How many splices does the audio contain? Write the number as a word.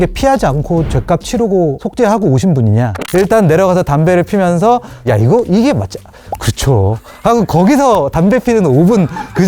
two